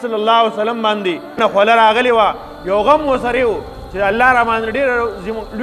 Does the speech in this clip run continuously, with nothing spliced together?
no; 1 cut; at 1.4 s

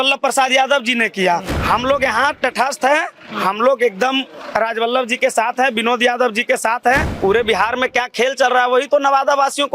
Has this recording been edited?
yes; 2 cuts; at 1.5 s, 7.1 s

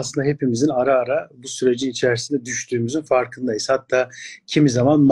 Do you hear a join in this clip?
no; 0 cuts

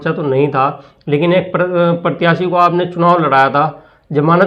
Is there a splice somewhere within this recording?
no; 0 cuts

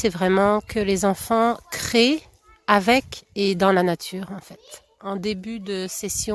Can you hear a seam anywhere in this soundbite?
yes; 1 cut; at 4.9 s

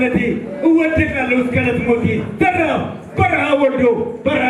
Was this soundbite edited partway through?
no; 0 cuts

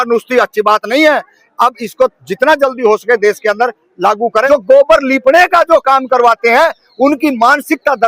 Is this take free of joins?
no; 1 cut; at 4.5 s

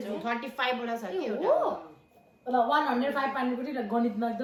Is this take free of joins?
yes; 0 cuts

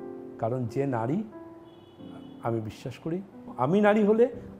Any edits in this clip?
yes; 1 cut; at 3.4 s

